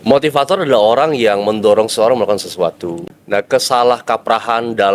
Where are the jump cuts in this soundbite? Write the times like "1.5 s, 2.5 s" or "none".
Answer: 3.0 s